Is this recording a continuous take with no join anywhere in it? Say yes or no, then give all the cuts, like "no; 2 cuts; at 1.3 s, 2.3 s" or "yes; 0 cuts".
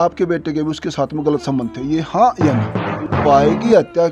no; 1 cut; at 3.0 s